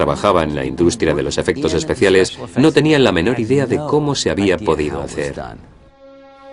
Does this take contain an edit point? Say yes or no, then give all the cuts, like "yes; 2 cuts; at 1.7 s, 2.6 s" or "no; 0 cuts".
yes; 1 cut; at 1.5 s